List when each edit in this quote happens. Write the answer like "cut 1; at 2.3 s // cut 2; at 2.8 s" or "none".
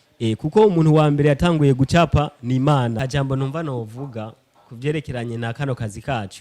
cut 1; at 3.0 s